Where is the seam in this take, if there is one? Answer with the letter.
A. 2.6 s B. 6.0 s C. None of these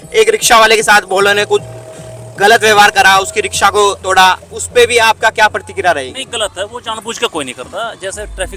C